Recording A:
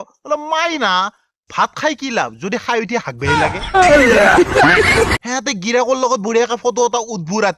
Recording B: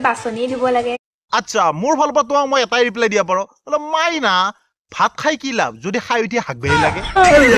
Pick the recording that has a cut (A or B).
A